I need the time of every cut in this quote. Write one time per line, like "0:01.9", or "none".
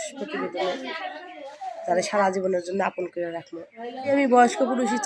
0:04.1